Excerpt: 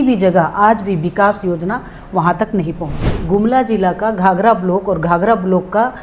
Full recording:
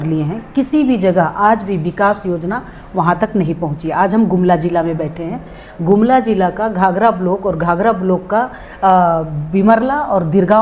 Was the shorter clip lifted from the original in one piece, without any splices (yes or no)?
no